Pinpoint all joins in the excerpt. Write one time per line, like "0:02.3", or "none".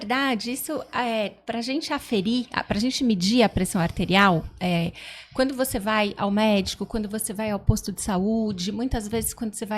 none